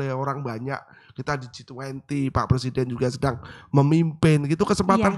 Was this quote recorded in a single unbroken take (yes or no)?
yes